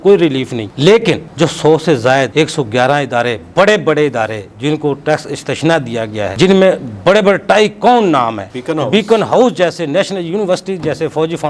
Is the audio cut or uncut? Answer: uncut